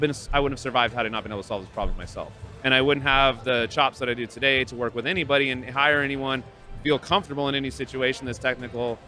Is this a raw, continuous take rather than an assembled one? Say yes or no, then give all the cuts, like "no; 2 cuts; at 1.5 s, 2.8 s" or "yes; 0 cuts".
yes; 0 cuts